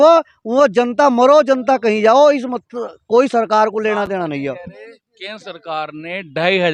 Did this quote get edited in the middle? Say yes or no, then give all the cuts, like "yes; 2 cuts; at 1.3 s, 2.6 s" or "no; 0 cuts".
no; 0 cuts